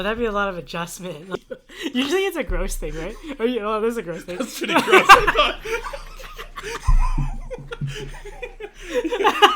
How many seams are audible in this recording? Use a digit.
1